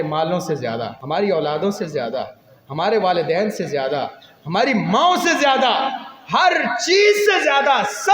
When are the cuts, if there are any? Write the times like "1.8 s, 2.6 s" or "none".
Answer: 1.0 s